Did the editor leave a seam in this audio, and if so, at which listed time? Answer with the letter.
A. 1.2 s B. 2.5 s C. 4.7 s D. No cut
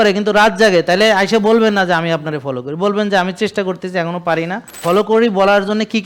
C